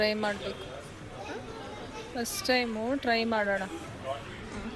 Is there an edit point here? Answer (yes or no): no